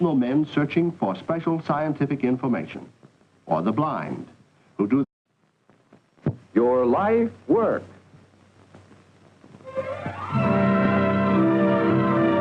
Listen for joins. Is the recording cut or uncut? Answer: uncut